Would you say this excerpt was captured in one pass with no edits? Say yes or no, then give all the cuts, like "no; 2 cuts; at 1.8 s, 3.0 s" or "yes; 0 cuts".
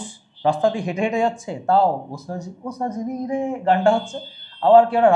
yes; 0 cuts